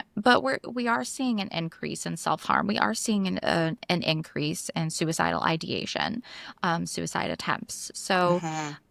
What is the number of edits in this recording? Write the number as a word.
zero